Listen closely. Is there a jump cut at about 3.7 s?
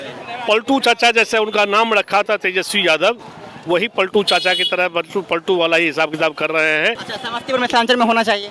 no; 1 cut; at 7.1 s

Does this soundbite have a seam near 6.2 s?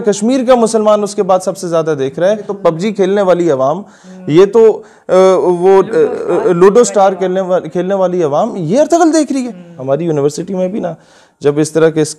no; 2 cuts; at 2.5 s, 9.7 s

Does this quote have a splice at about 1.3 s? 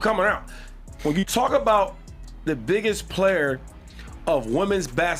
no; 1 cut; at 3.1 s

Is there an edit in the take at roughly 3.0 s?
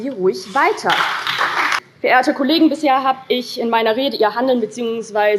no; 1 cut; at 1.8 s

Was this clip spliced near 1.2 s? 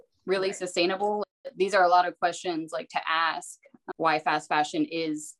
yes; 2 cuts; at 1.2 s, 3.8 s

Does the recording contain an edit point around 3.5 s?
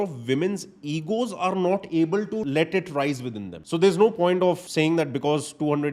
yes; 3 cuts; at 2.4 s, 3.5 s, 4.6 s

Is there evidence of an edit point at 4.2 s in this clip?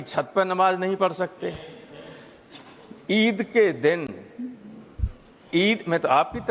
no; 0 cuts

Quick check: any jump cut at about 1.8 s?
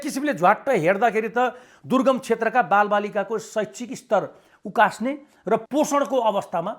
no; 1 cut; at 5.6 s

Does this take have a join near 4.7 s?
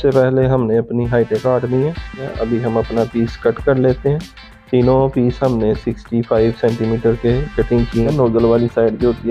no; 2 cuts; at 2.3 s, 8.1 s

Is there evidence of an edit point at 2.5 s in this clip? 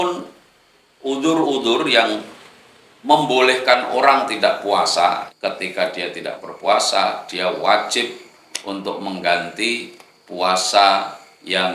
no; 1 cut; at 5.3 s

